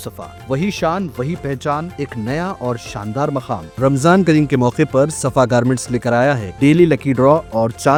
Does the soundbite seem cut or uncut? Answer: uncut